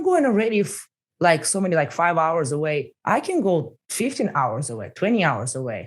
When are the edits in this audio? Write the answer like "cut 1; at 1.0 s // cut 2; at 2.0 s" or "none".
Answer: cut 1; at 2.9 s // cut 2; at 3.8 s